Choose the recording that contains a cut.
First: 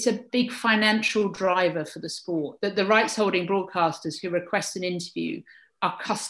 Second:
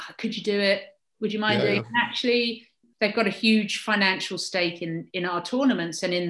second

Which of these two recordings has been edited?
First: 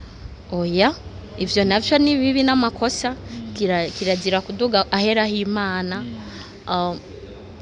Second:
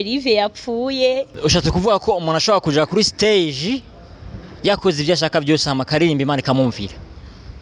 second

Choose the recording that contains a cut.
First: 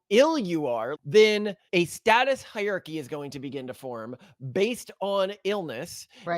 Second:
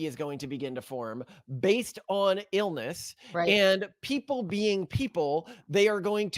first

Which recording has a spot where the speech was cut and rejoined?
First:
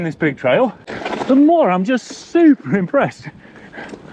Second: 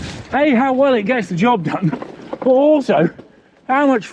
first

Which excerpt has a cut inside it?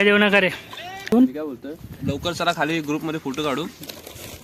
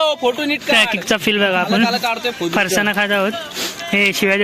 first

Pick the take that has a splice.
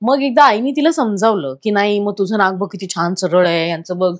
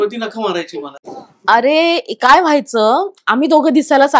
second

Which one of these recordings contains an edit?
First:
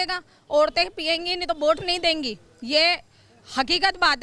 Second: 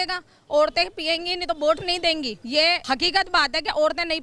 second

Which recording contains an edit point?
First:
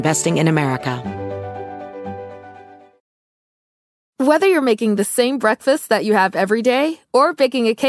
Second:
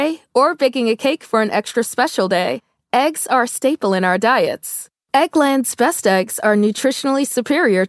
first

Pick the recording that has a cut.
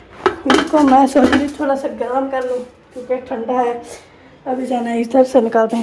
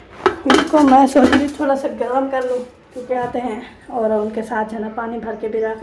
second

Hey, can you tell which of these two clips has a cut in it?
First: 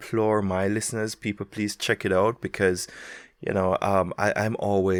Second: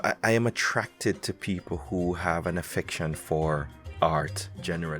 second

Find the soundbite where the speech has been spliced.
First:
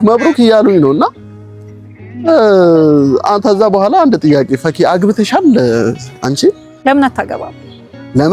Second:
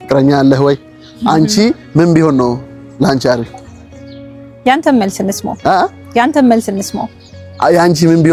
first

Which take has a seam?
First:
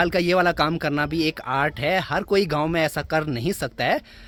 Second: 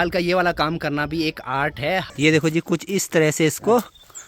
second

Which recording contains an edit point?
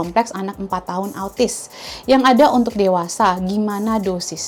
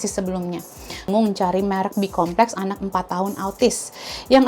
second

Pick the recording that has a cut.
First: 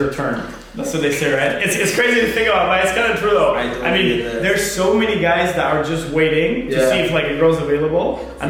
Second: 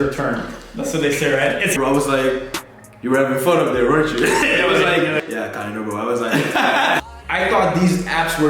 second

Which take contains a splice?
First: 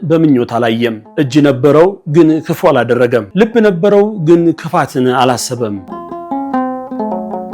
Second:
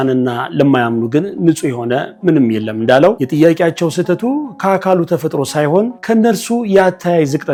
first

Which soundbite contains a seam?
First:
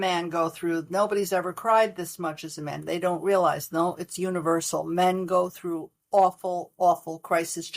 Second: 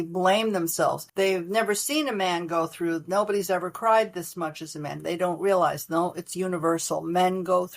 second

